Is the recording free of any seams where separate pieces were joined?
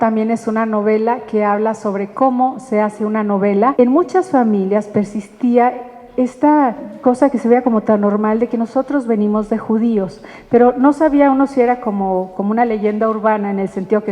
no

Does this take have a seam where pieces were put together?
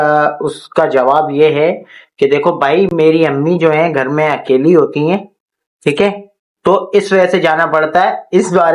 no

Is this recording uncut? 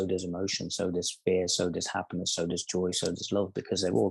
yes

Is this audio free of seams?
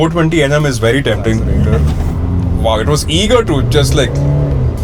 no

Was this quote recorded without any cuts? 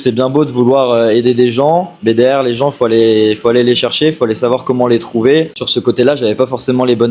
no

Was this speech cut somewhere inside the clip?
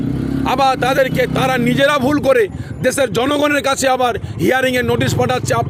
no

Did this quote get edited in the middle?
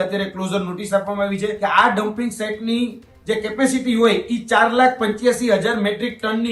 yes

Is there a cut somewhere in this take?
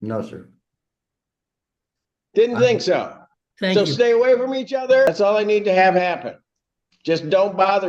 yes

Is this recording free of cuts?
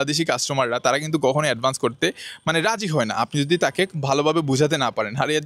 yes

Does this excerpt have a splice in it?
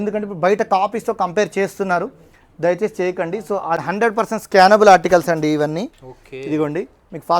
yes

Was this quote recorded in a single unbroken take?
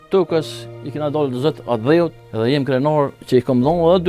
no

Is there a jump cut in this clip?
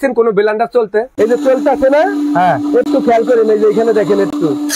yes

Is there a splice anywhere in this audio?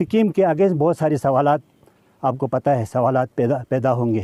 no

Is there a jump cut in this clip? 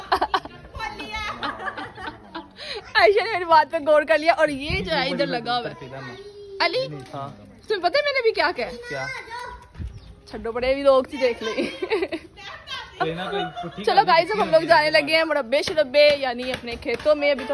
no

